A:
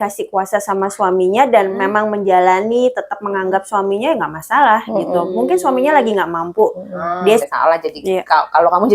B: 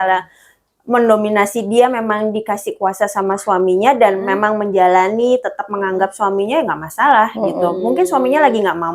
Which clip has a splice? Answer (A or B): A